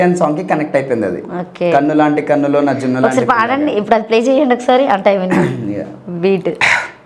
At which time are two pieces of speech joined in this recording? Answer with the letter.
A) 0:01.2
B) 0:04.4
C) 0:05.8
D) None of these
D